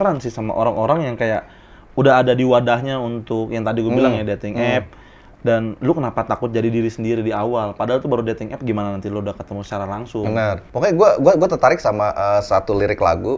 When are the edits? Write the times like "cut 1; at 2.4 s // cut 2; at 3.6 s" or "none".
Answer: none